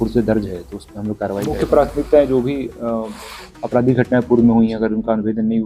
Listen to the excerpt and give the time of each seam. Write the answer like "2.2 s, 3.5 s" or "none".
1.6 s

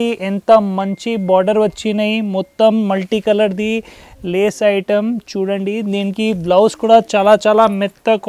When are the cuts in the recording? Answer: none

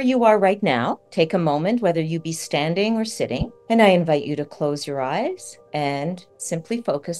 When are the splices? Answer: 1.0 s, 3.5 s, 5.5 s, 6.3 s

